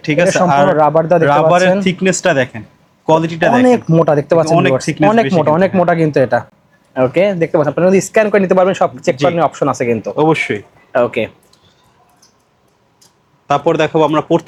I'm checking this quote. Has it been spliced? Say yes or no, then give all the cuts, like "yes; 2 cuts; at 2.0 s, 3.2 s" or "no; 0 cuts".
no; 0 cuts